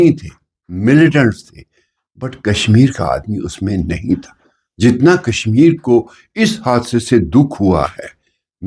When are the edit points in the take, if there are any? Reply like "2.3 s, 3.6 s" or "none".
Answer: none